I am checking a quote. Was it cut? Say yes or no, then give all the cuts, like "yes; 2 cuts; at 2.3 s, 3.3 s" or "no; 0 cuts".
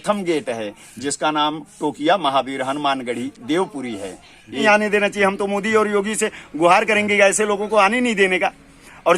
yes; 1 cut; at 4.6 s